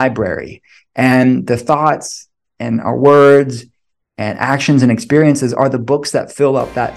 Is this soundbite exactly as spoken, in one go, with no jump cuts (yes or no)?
yes